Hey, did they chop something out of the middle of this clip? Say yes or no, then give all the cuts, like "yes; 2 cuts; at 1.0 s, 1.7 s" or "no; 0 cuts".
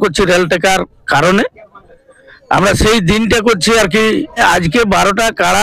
yes; 1 cut; at 4.4 s